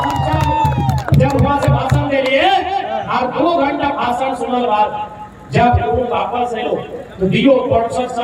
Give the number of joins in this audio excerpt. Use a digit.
0